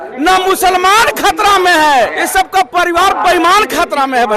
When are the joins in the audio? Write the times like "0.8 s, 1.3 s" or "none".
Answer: 2.1 s